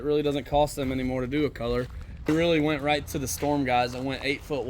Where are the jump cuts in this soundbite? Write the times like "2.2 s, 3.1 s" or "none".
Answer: 2.3 s